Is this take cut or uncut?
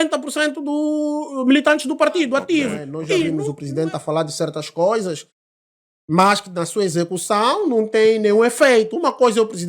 cut